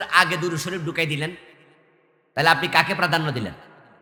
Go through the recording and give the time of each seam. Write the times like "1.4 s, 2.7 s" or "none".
none